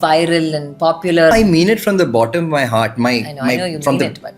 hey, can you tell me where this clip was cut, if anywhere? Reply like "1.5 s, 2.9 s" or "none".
1.3 s